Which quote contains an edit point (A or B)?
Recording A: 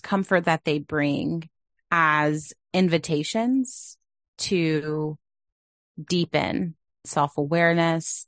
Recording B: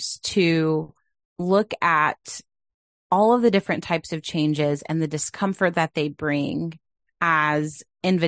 A